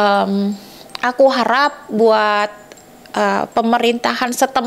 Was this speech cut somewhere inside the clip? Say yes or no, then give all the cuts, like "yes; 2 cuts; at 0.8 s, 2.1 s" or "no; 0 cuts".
no; 0 cuts